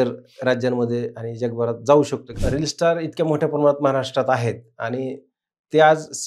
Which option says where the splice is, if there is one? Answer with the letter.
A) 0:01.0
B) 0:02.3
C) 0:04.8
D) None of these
B